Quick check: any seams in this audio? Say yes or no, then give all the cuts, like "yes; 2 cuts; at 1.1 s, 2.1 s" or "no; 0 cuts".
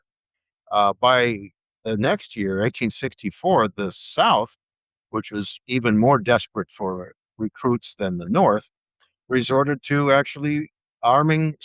no; 0 cuts